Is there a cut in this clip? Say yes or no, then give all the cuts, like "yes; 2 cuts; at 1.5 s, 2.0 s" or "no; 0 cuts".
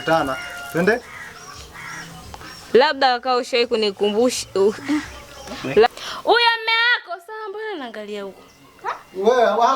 yes; 1 cut; at 5.9 s